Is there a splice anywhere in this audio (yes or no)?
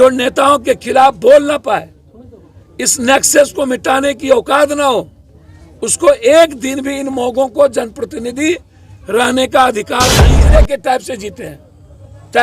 yes